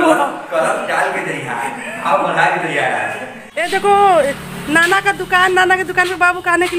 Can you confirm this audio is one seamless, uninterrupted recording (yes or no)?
no